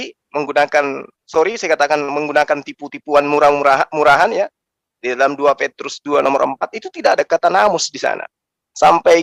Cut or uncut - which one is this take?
uncut